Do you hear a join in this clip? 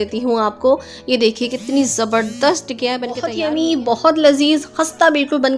yes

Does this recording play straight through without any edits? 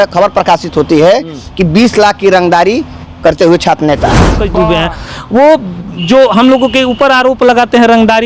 no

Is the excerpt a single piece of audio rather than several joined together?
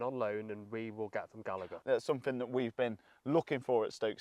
no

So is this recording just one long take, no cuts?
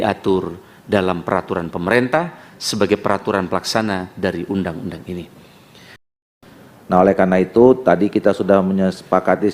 no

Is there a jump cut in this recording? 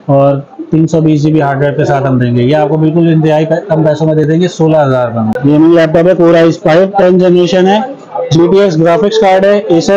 yes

